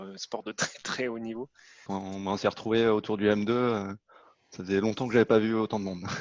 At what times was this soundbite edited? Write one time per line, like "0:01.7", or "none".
0:01.9